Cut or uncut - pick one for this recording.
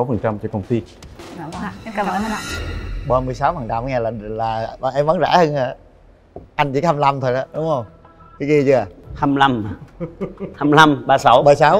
uncut